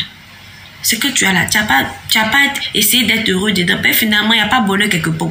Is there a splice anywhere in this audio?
no; 0 cuts

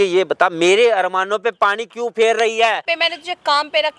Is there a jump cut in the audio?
yes; 1 cut; at 2.8 s

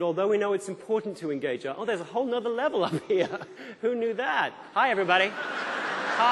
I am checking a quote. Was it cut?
no; 0 cuts

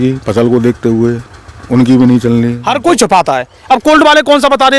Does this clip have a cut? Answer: yes; 1 cut; at 2.6 s

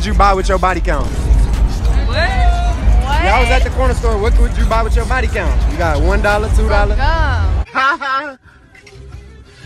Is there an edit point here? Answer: no; 0 cuts

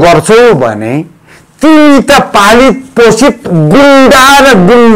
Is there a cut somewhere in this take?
no; 0 cuts

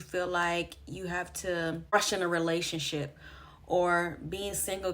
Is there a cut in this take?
yes; 1 cut; at 1.9 s

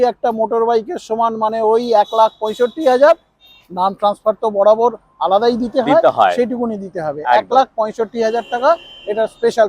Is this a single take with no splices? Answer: yes; 0 cuts

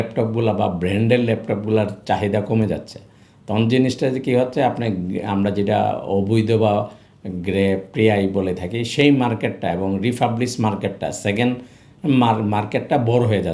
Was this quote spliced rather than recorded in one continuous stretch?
no; 0 cuts

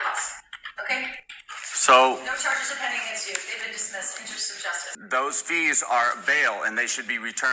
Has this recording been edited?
yes; 1 cut; at 4.9 s

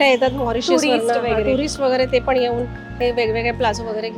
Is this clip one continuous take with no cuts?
yes; 0 cuts

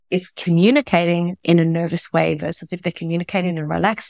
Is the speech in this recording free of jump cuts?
yes; 0 cuts

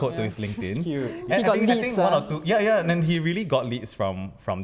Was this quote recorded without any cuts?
no; 1 cut; at 1.2 s

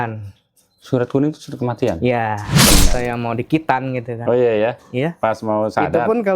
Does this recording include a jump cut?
yes; 1 cut; at 2.8 s

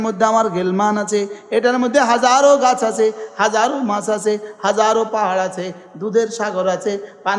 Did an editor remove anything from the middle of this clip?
no; 0 cuts

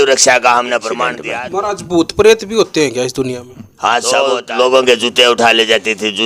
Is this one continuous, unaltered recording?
no; 2 cuts; at 1.2 s, 4.2 s

